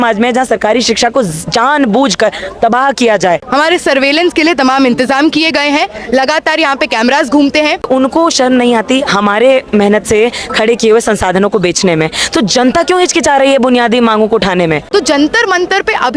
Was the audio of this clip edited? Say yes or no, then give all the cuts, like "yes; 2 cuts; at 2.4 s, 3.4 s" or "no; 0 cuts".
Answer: yes; 3 cuts; at 3.4 s, 7.9 s, 14.8 s